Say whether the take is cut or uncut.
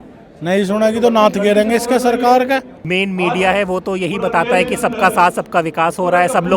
cut